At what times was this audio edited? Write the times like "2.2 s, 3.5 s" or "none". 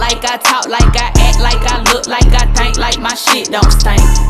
none